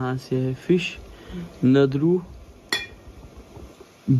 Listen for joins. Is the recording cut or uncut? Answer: uncut